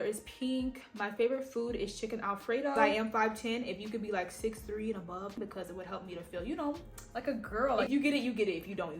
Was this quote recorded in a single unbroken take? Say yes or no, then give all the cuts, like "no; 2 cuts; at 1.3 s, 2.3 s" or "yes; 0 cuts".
no; 3 cuts; at 2.8 s, 5.4 s, 7.8 s